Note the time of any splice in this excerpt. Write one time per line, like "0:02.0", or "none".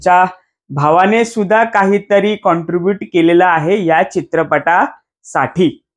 none

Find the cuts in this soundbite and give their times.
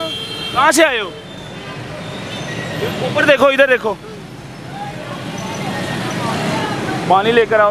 none

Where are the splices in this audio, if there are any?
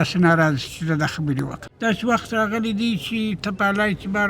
0:01.6

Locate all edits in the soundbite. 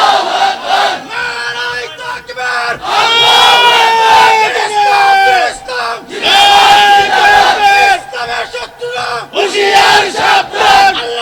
none

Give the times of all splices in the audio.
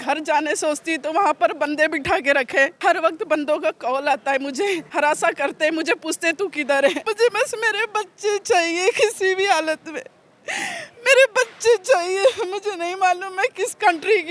0:02.7
0:04.8
0:07.1

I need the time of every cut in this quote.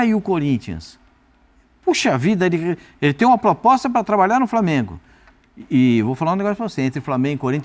none

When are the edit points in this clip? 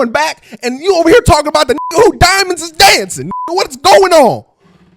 none

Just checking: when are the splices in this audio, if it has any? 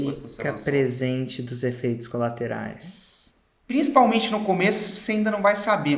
0:03.5

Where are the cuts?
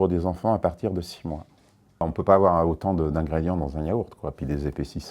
0:01.9

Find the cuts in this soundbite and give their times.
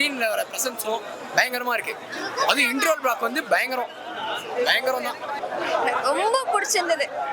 0:05.4

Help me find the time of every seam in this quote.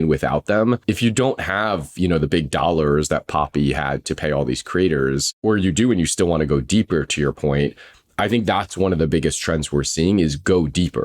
0:00.8
0:05.3

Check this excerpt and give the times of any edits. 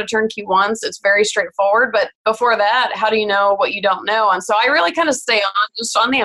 0:02.1

